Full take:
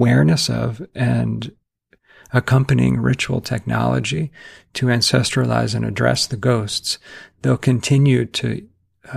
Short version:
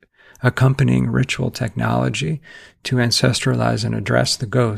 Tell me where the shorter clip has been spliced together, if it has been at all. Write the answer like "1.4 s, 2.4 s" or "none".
none